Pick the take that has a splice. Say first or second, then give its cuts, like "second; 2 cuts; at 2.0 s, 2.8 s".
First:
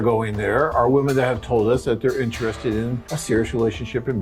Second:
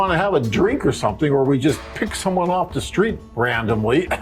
first; 1 cut; at 3.1 s